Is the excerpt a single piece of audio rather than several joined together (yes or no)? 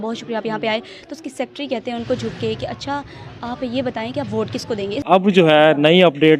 no